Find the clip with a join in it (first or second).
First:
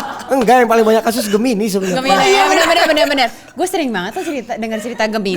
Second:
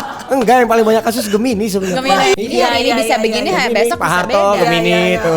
second